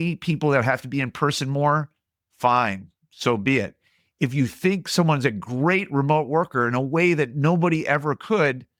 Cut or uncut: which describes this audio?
uncut